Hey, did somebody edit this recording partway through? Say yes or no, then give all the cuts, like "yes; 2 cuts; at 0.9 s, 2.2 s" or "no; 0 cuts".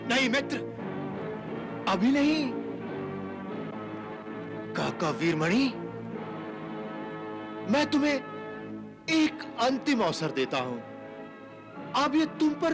no; 0 cuts